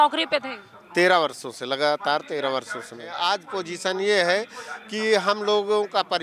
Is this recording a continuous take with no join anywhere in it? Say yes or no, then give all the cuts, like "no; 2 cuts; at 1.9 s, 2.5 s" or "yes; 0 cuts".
no; 1 cut; at 3.1 s